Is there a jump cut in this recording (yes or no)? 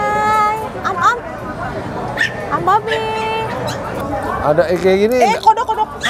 yes